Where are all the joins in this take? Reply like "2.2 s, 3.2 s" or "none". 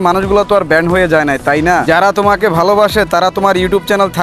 1.8 s